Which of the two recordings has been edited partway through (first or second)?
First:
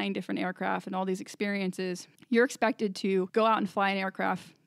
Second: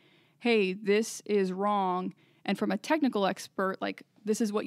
first